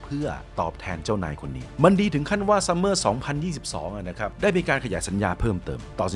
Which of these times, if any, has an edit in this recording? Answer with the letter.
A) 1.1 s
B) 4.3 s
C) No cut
C